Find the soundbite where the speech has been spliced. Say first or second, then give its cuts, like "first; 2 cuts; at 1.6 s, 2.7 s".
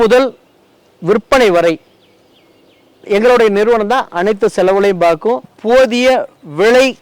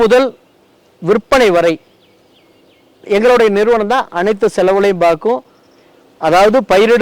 first; 1 cut; at 5.5 s